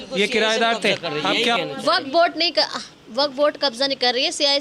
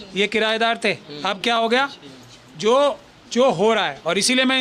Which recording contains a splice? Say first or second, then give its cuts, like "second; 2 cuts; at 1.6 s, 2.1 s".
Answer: first; 1 cut; at 1.6 s